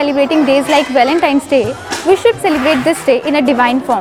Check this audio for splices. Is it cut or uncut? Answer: uncut